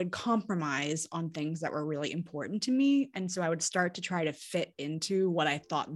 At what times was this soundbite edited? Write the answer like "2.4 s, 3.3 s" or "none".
none